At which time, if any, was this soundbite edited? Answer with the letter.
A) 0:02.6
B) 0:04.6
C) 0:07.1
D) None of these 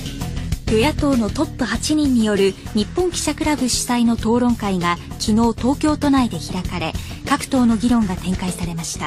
D